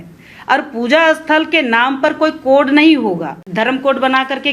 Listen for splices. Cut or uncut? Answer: cut